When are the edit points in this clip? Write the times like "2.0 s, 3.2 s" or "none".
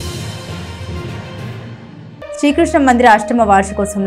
2.1 s

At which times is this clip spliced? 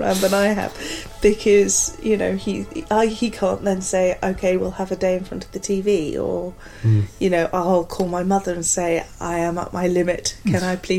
none

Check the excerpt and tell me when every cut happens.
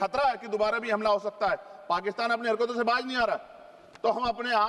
none

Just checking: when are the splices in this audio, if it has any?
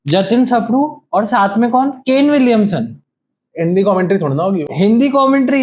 none

